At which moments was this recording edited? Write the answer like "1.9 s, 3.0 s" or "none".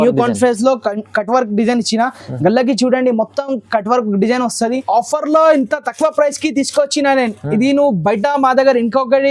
4.8 s

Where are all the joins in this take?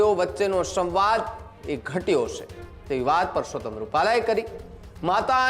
none

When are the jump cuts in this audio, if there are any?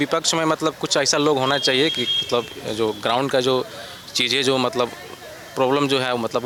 none

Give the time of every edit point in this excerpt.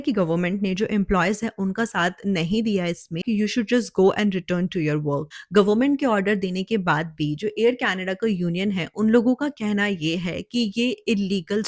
3.2 s, 5.3 s

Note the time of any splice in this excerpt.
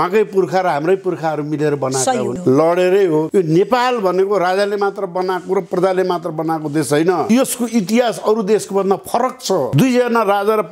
2.4 s, 3.3 s, 7.2 s, 9.7 s

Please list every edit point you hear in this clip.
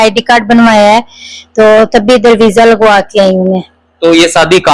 none

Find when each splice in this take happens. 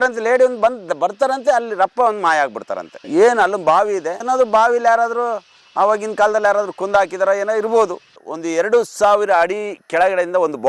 4.1 s, 8.1 s

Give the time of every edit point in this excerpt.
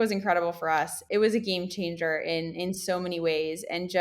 1.0 s

